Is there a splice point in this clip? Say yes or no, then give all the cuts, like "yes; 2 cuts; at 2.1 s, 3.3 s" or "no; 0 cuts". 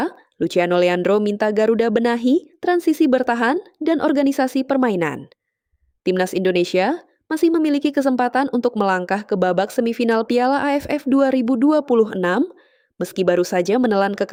no; 0 cuts